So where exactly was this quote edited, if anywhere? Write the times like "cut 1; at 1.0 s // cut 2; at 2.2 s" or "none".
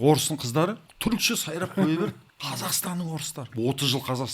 cut 1; at 0.9 s // cut 2; at 2.3 s // cut 3; at 3.5 s